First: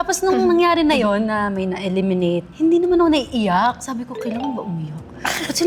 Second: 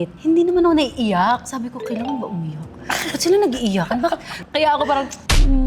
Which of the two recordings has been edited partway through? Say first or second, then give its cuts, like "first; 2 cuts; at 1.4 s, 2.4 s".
second; 1 cut; at 4.3 s